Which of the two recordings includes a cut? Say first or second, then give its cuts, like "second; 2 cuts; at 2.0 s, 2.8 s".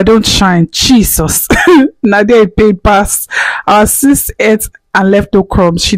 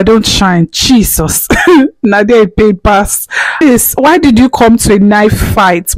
second; 1 cut; at 3.6 s